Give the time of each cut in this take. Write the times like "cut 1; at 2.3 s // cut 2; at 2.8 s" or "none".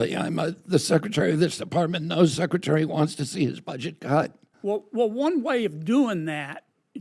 cut 1; at 4.4 s